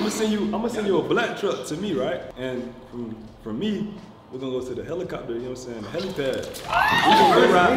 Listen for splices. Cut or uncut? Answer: uncut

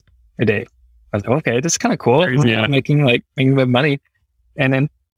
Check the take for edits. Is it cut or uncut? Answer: uncut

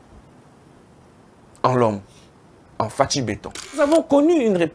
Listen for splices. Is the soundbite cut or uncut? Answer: cut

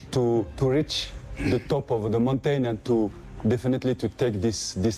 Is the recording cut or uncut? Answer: uncut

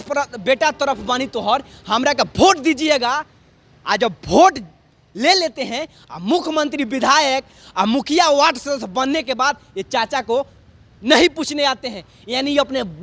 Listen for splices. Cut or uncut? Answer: uncut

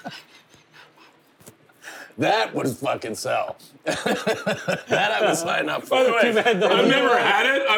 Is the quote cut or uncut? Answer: uncut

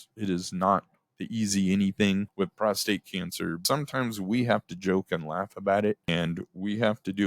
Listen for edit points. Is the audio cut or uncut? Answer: cut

